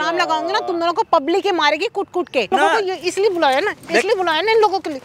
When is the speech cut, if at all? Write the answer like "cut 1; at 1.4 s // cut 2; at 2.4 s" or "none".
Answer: cut 1; at 2.5 s